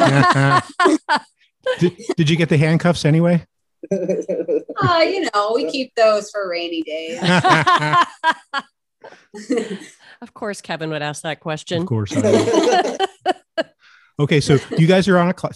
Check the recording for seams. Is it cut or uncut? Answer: uncut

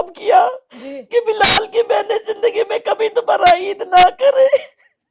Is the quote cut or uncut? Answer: uncut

